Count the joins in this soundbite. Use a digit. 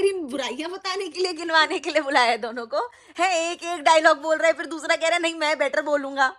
0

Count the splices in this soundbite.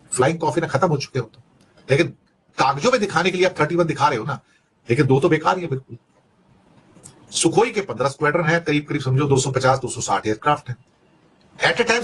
0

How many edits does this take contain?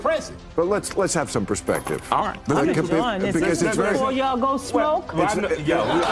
0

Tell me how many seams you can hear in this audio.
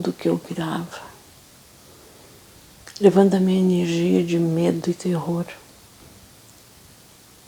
1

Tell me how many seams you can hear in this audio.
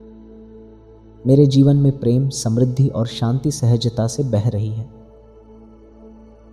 2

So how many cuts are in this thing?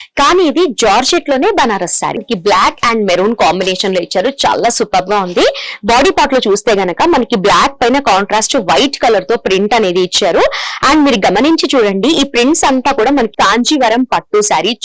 2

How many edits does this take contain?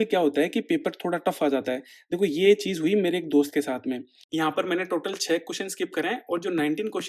1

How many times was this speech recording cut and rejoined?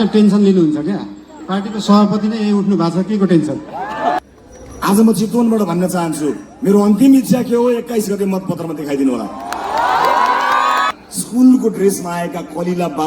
2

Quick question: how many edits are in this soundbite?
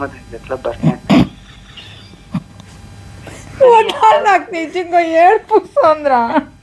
0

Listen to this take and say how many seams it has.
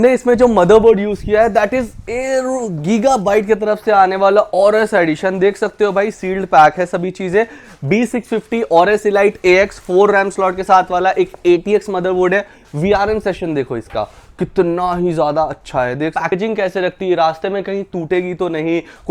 1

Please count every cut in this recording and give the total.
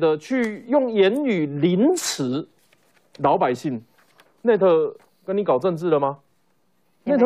0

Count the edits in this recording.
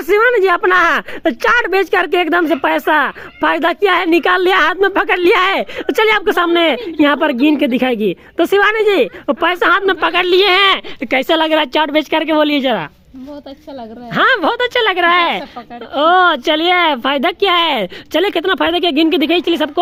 0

